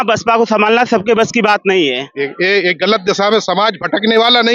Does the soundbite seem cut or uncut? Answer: cut